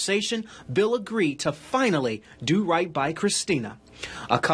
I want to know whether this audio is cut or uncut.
uncut